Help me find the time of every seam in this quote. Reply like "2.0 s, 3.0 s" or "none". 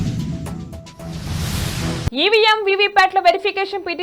2.0 s